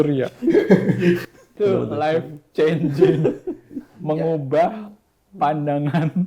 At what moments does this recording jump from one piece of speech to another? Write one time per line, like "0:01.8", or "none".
0:01.5